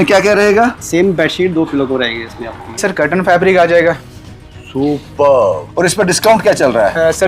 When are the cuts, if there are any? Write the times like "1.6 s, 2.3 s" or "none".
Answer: 2.9 s